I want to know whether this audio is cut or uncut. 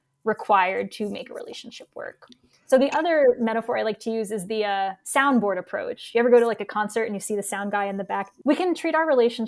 cut